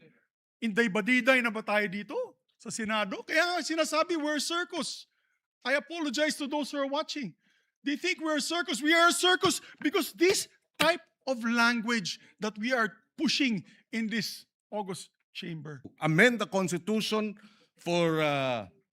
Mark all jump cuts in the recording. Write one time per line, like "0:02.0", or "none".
0:15.9